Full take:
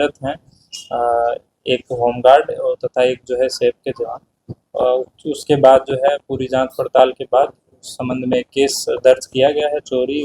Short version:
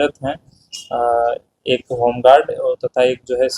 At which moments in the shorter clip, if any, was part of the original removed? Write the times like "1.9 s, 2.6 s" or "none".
none